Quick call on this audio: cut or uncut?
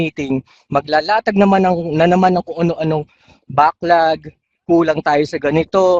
uncut